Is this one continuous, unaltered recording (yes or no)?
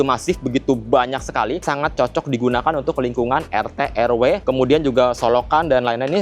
yes